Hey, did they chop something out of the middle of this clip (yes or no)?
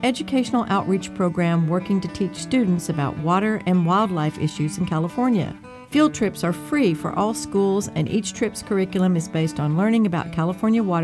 no